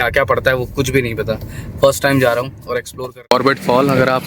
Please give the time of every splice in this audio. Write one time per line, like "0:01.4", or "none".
0:03.3